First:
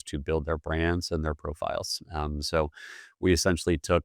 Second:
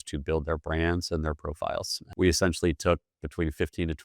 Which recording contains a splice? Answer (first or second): second